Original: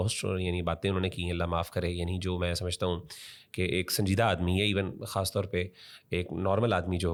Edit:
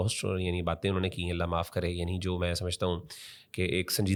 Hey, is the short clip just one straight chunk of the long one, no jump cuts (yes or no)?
yes